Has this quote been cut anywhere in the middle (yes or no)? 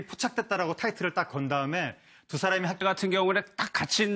no